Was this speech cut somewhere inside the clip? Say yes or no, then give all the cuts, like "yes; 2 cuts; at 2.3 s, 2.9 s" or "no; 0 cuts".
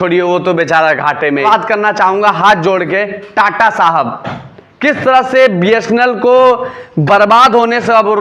yes; 1 cut; at 1.4 s